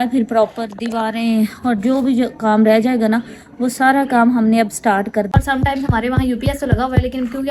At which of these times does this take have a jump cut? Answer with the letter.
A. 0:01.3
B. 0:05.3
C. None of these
B